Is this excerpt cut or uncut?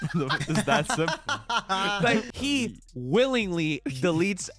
cut